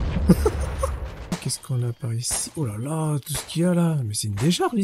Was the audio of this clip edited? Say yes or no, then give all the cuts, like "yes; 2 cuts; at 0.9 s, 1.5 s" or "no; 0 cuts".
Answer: yes; 1 cut; at 1.3 s